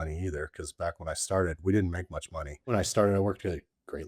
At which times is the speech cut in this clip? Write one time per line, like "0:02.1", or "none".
0:02.7